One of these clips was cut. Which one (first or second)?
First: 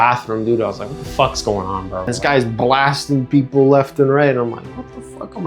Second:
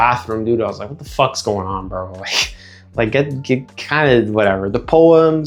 first